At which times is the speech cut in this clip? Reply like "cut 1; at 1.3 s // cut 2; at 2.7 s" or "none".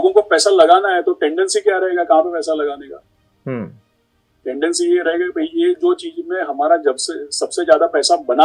none